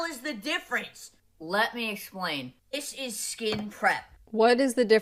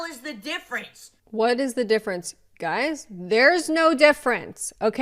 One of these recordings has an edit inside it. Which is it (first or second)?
second